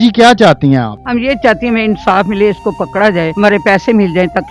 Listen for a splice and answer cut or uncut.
cut